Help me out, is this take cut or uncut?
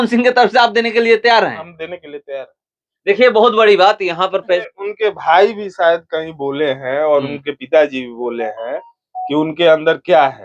cut